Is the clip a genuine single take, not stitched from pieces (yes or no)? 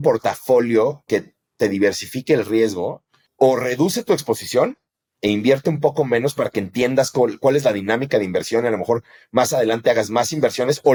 yes